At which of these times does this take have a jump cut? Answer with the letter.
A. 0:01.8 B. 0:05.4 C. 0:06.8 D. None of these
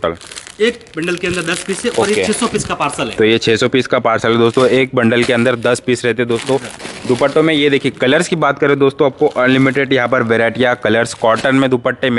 C